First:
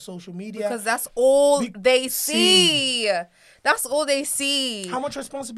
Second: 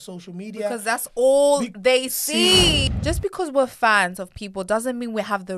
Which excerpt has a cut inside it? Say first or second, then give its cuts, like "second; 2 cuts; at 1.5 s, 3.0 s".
second; 1 cut; at 2.9 s